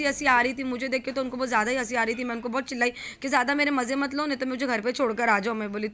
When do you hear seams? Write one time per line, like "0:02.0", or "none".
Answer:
none

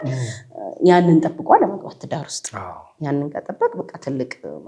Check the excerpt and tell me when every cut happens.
none

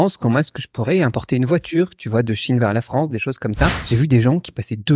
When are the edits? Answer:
0:03.8

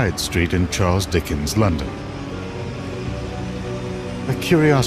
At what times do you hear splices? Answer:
0:02.6

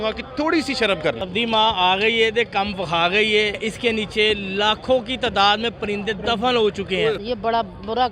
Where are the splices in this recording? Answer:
0:01.2
0:03.6
0:07.2

